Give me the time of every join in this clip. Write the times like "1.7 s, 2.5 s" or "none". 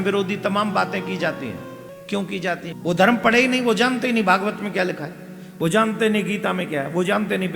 1.9 s, 2.8 s